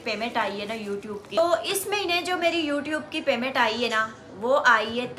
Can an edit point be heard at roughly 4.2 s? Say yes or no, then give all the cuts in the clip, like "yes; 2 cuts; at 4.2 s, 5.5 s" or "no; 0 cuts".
no; 1 cut; at 1.2 s